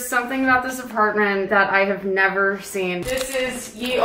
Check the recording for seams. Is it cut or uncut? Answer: cut